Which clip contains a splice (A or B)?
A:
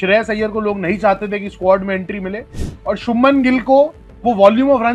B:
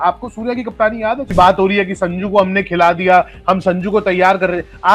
B